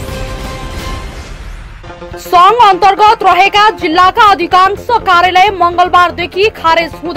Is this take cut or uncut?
uncut